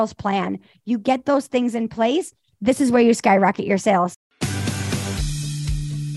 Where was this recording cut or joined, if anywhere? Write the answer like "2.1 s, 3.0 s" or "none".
4.1 s